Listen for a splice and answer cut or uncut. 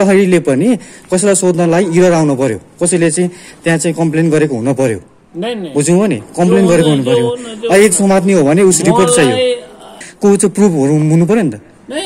cut